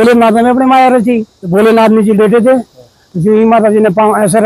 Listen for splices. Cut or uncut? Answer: cut